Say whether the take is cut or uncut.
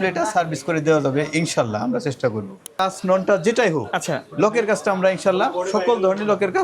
cut